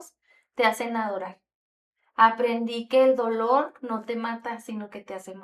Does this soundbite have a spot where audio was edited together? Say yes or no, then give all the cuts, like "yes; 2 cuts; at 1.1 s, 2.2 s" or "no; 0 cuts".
no; 0 cuts